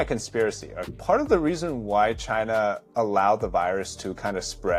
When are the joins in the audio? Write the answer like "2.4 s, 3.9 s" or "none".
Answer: 0.9 s